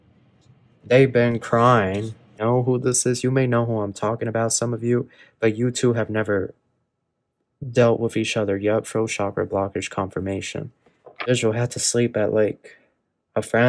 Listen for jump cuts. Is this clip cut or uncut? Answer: cut